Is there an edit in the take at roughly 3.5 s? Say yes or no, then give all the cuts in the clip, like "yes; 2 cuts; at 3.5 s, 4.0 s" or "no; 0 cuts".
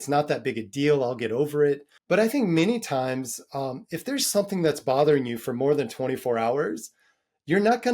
no; 1 cut; at 1.9 s